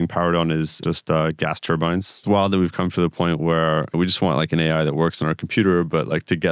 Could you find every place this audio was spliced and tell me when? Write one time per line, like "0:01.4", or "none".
0:00.8
0:02.2
0:03.9